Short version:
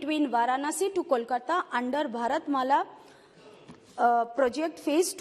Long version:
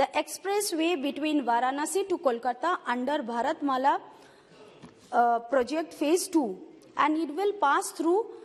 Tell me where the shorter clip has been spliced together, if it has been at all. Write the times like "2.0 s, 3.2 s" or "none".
none